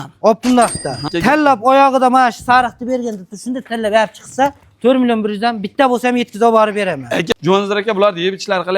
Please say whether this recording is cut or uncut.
cut